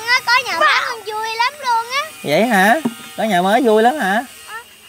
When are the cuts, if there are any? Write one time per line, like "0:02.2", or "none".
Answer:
none